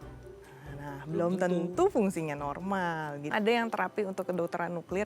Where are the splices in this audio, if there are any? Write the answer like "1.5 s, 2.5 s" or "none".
3.3 s